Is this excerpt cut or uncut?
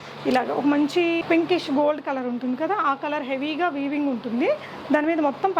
uncut